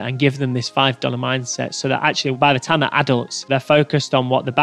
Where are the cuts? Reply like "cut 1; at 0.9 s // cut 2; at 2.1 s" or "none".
cut 1; at 3.4 s